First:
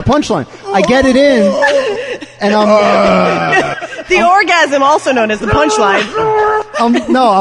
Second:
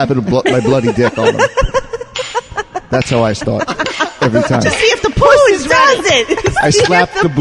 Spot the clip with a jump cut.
second; 1 cut; at 2.1 s

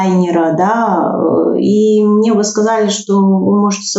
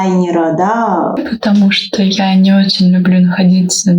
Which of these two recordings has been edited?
second; 1 cut; at 1.2 s

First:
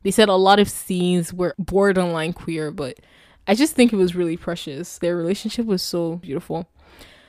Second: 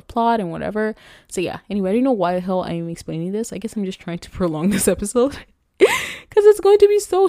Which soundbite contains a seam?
first; 3 cuts; at 1.6 s, 4.9 s, 6.2 s

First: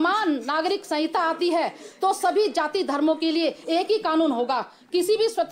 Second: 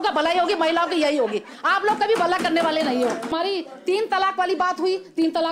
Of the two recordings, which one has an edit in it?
second; 1 cut; at 3.3 s

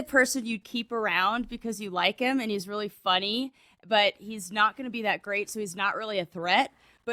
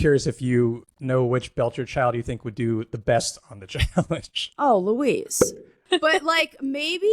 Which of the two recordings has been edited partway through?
second; 2 cuts; at 0.9 s, 5.8 s

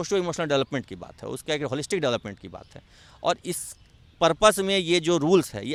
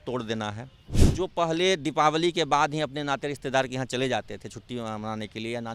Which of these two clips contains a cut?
second; 1 cut; at 1.0 s

